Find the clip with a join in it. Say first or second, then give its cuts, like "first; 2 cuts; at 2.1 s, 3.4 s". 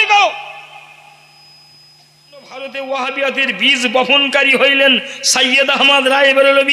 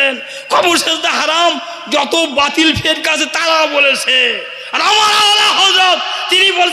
first; 1 cut; at 2.6 s